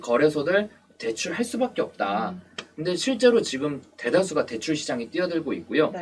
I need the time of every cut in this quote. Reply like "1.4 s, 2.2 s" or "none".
none